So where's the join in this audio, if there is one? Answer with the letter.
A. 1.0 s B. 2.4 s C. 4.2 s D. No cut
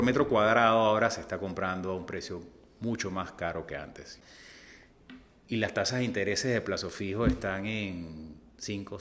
C